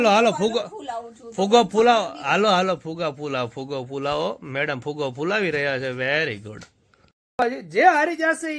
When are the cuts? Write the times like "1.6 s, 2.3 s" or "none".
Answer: 7.4 s